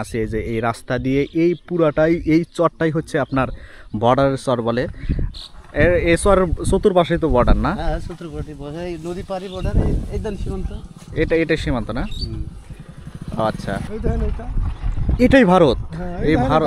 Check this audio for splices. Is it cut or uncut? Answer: cut